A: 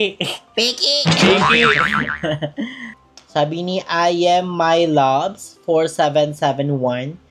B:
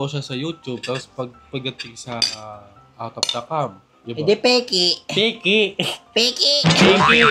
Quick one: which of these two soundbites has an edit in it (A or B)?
A